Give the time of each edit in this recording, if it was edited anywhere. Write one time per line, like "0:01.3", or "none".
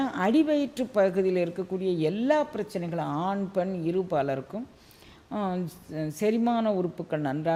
none